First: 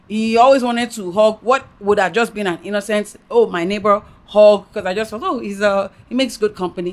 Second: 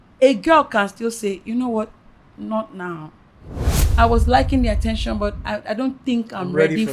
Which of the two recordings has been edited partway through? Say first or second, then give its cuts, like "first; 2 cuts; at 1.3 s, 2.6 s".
second; 1 cut; at 3.8 s